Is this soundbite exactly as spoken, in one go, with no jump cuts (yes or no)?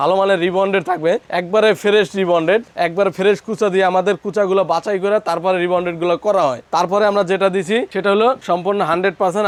yes